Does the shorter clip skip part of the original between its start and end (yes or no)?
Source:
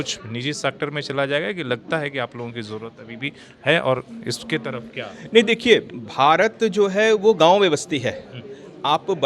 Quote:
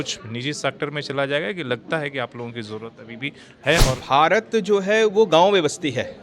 yes